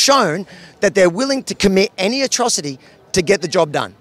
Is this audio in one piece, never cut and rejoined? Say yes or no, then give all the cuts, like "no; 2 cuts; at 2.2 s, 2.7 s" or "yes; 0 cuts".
no; 1 cut; at 1.5 s